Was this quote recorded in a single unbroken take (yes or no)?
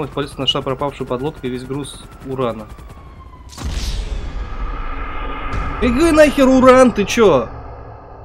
yes